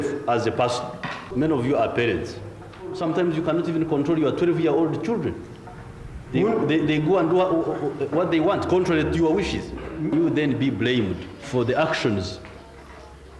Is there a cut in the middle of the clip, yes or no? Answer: yes